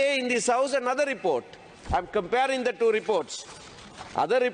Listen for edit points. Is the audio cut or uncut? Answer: uncut